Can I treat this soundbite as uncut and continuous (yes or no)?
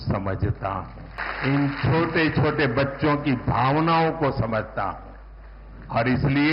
no